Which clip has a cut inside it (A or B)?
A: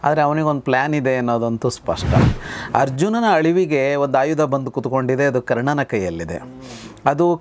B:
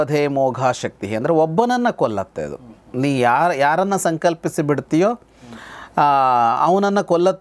A